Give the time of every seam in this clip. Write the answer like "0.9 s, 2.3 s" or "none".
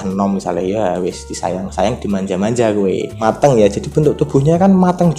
3.1 s